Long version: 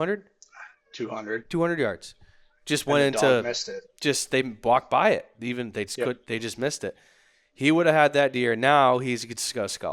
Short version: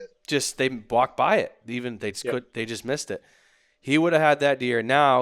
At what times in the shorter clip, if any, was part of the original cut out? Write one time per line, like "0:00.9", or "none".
none